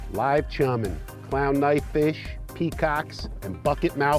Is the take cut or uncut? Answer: uncut